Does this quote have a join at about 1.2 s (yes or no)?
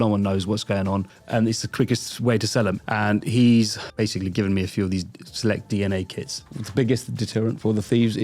yes